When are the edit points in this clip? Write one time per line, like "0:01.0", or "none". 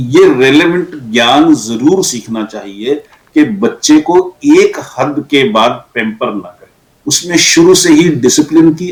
none